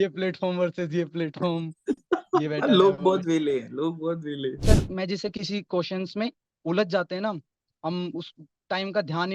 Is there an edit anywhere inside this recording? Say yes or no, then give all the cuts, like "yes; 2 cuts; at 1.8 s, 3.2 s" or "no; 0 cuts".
yes; 1 cut; at 4.6 s